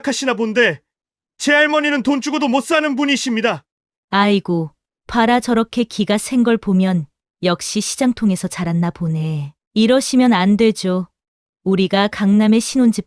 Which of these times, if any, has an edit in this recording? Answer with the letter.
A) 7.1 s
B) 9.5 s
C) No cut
B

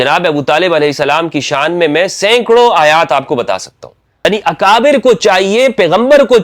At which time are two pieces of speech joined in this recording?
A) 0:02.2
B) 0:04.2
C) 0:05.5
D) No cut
B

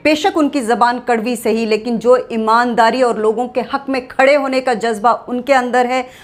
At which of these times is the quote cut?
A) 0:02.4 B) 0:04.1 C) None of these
C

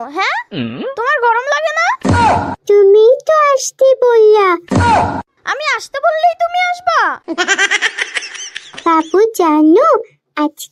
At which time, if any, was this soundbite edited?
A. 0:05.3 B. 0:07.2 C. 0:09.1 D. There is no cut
D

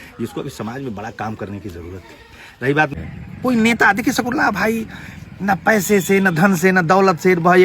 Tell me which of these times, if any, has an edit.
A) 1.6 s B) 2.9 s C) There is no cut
B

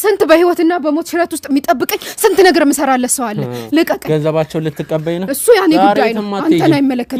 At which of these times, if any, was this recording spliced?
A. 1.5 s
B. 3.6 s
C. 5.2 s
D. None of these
D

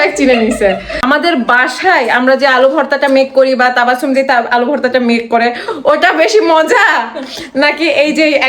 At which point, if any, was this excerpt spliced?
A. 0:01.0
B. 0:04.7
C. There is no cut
A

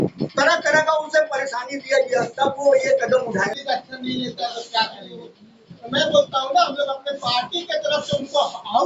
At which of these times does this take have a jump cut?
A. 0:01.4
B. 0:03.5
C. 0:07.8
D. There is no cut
B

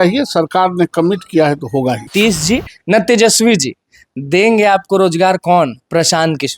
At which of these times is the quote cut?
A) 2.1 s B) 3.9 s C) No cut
A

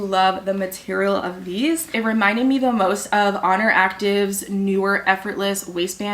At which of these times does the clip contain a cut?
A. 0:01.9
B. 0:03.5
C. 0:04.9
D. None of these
A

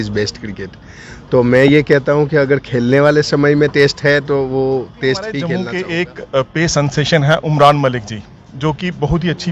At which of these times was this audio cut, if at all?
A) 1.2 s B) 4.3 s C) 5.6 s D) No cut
C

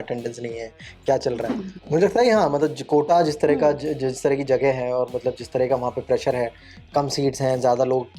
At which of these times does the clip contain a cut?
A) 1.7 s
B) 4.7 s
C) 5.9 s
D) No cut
A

